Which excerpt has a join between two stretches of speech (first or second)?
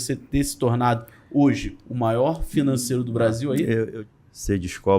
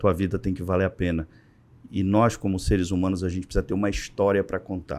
first